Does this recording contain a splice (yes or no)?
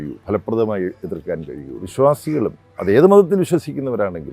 yes